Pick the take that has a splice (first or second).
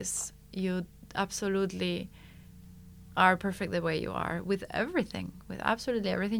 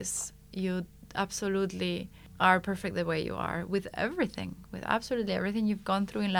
second